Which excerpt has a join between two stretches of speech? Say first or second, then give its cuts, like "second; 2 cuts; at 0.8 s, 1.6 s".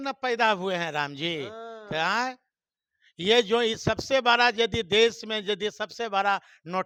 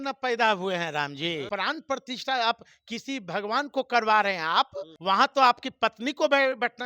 second; 2 cuts; at 1.4 s, 4.9 s